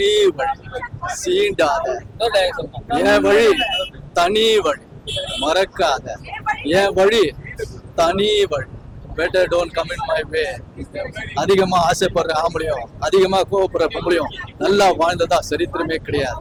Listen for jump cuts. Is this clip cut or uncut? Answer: uncut